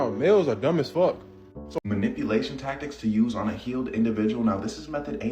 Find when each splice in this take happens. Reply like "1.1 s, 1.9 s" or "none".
1.8 s